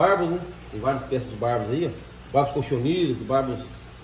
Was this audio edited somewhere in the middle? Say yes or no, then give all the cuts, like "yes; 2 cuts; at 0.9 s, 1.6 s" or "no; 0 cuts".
no; 0 cuts